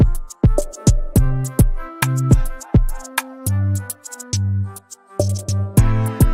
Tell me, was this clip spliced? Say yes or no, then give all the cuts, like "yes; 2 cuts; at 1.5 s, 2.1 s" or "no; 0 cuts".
yes; 1 cut; at 3.5 s